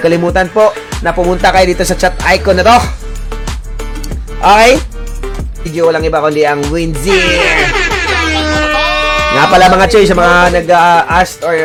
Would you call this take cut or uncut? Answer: uncut